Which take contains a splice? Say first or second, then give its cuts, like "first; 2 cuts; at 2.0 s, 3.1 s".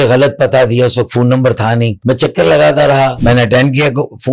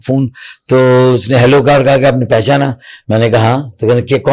first; 2 cuts; at 1.9 s, 3.2 s